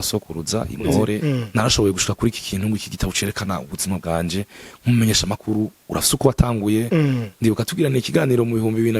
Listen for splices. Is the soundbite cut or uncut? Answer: cut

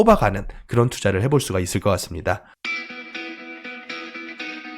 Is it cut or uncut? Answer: cut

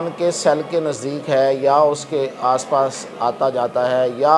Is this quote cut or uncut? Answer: uncut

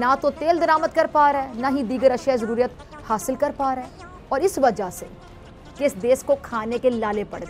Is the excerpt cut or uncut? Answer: cut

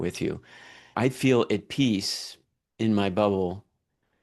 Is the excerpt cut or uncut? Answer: cut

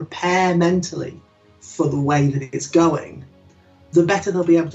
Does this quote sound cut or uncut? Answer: cut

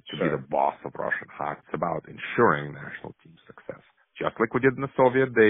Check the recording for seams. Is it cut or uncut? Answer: cut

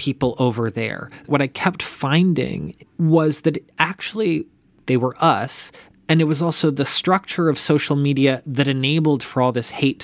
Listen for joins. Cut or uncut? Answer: cut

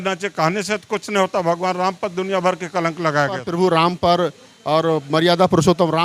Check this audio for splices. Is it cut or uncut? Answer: cut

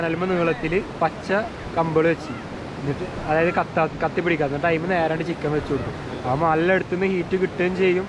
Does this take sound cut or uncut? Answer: uncut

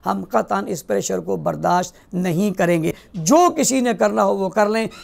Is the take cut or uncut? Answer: cut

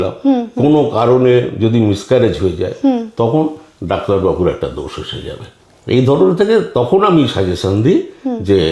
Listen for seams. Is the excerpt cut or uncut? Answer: uncut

